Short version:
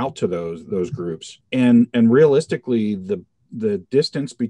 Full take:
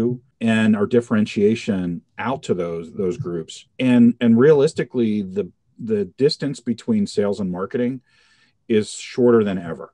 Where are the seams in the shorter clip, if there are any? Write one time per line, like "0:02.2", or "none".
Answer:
none

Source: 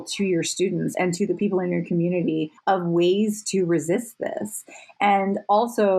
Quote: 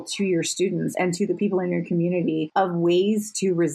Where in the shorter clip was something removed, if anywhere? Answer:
0:02.5

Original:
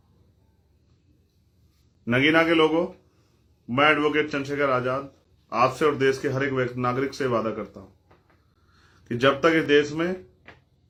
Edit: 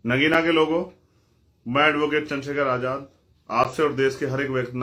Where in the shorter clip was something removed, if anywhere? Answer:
none

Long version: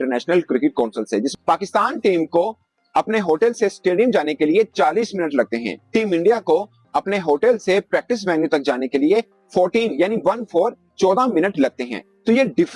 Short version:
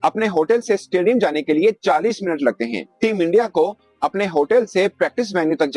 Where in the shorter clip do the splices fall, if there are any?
none

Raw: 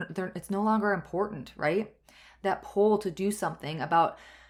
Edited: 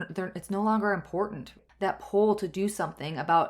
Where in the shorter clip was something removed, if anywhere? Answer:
0:01.4

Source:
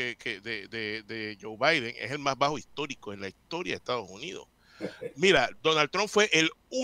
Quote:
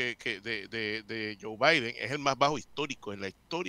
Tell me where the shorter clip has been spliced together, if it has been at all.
none

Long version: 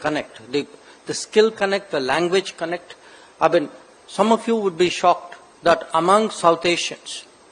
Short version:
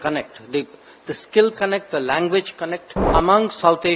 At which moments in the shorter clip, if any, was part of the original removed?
0:03.0

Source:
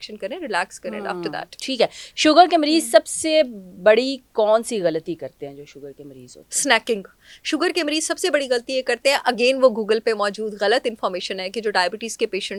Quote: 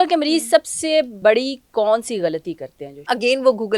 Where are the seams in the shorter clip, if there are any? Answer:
0:01.1
0:03.0

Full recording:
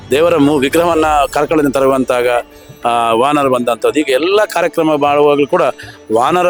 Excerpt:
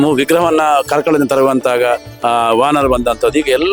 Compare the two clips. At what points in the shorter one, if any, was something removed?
0:02.1

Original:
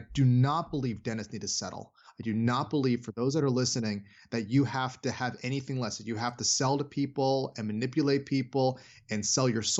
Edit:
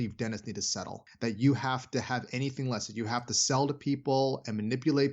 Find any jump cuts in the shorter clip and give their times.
0:01.0

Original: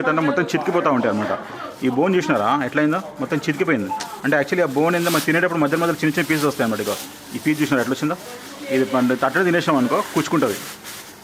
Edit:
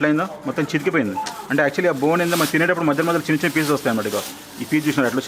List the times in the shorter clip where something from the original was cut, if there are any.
none

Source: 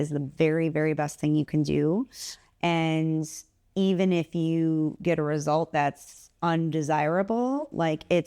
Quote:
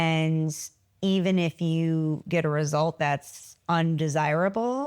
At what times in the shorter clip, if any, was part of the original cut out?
none

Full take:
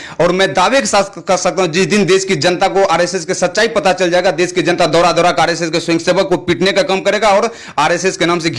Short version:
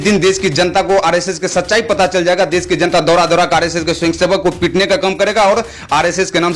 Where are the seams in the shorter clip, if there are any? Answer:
none

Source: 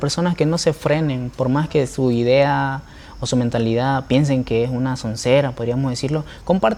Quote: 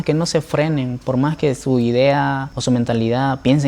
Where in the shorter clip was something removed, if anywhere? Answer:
0:02.5

